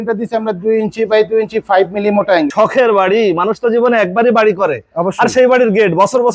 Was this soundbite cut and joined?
yes; 1 cut; at 2.5 s

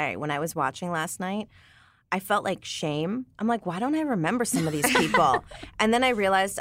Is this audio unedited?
yes; 0 cuts

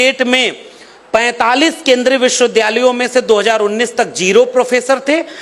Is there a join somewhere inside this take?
no; 0 cuts

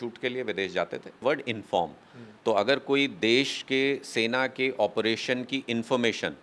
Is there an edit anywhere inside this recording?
yes; 1 cut; at 1.2 s

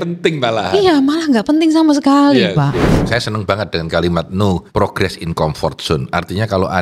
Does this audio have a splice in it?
yes; 2 cuts; at 3.0 s, 4.7 s

